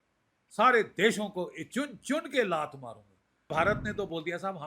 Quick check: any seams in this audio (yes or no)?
yes